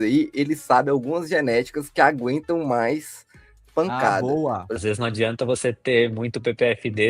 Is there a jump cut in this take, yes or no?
yes